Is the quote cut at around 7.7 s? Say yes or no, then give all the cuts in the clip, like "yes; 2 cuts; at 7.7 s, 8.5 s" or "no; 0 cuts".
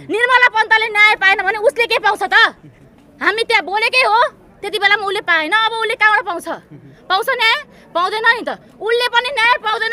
no; 0 cuts